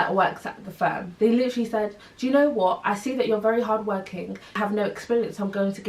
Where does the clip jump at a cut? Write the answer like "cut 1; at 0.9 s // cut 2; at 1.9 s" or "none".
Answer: cut 1; at 1.1 s // cut 2; at 4.6 s